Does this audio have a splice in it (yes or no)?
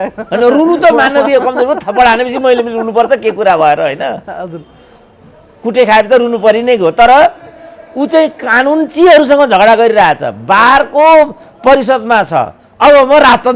no